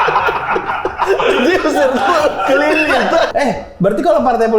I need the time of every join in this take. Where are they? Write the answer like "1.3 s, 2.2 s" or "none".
3.3 s